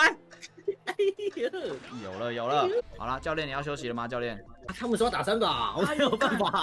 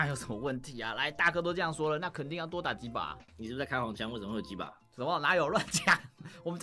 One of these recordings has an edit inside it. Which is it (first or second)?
first